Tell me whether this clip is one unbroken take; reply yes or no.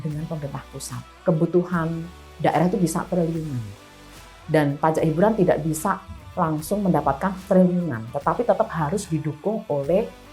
no